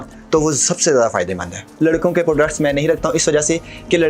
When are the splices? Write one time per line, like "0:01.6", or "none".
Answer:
0:01.7